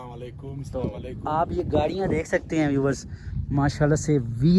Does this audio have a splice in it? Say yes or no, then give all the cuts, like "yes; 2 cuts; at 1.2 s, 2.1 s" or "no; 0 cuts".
no; 0 cuts